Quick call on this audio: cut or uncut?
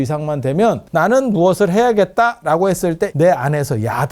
cut